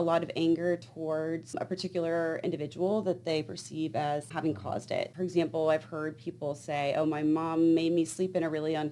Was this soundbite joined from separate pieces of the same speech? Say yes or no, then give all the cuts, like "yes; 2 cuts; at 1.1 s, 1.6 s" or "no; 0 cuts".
no; 0 cuts